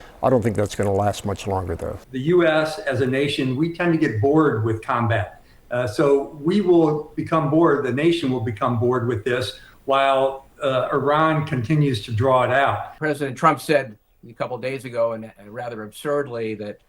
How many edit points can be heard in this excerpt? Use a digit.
2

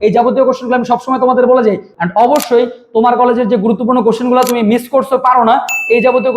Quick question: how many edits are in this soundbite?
1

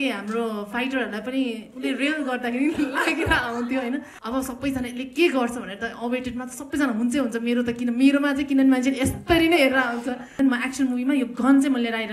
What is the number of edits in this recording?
2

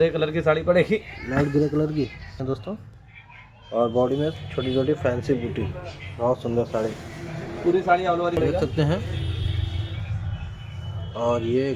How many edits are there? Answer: 2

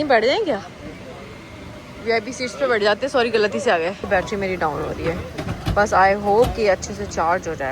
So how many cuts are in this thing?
1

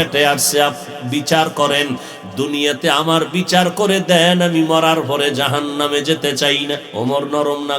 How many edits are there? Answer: 1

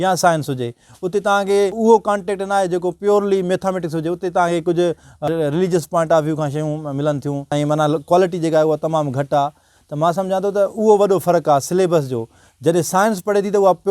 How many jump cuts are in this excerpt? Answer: 3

